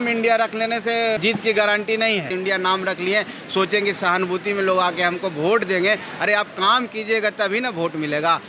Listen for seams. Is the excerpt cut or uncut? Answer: cut